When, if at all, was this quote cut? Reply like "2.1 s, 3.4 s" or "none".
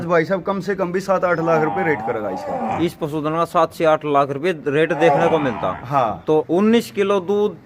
6.5 s